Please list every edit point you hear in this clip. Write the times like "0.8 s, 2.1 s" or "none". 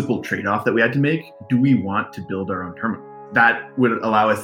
1.3 s, 3.1 s